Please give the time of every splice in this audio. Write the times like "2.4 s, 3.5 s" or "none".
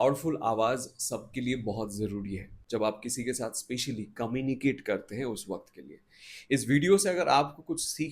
2.5 s